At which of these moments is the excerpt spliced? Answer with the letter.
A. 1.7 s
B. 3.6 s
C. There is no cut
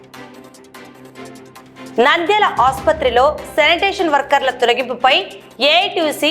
A